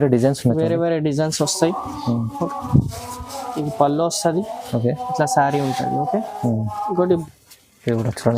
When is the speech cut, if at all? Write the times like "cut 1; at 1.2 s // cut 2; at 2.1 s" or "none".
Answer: cut 1; at 7.2 s